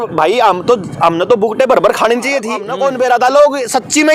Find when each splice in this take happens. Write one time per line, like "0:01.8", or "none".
0:02.7